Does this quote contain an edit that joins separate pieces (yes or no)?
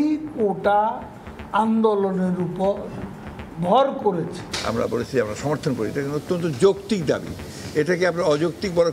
yes